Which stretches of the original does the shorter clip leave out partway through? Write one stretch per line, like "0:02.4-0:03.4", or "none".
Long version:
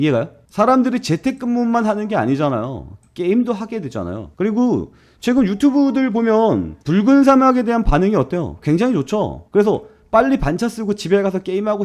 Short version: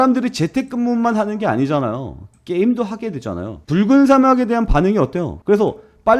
0:04.3-0:06.7
0:08.5-0:09.4